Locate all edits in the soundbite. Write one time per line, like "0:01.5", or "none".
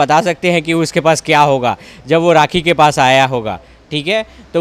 none

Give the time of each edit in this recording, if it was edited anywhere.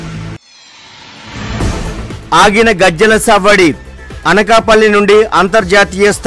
0:02.1

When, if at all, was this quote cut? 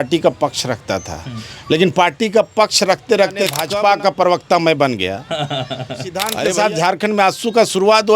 0:03.7
0:06.3

